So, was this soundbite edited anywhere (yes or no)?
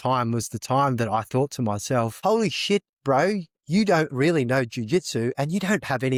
no